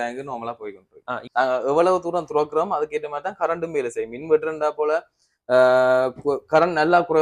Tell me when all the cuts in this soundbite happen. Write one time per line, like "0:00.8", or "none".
0:01.2

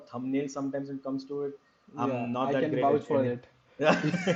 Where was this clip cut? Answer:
none

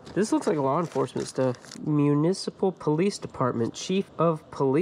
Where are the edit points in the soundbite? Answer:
0:01.8

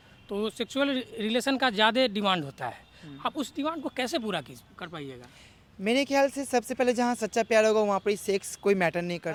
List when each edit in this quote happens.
none

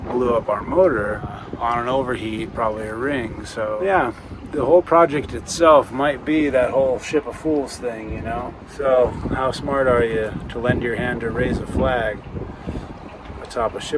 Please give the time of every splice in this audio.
0:01.4
0:03.8
0:08.6

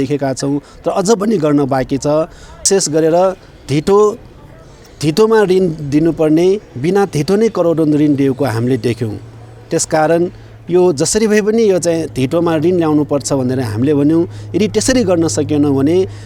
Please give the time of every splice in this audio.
0:02.7

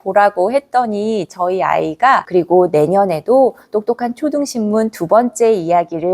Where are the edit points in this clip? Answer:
0:02.2

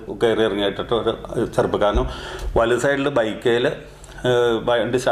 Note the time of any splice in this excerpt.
none

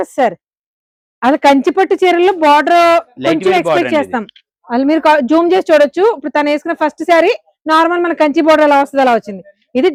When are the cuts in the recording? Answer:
none

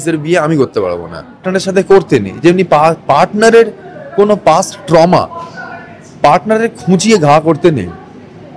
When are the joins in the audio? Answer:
0:01.5

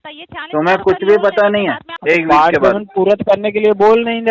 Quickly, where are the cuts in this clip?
0:01.9

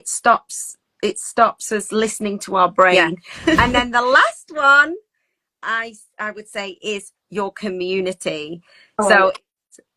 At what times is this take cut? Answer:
0:03.6

